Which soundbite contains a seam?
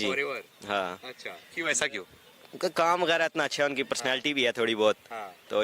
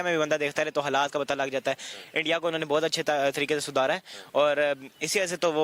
first; 1 cut; at 2.1 s

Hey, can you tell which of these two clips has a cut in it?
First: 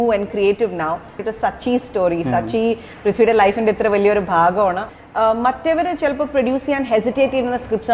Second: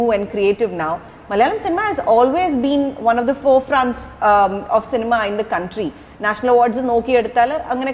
first; 2 cuts; at 1.1 s, 4.9 s

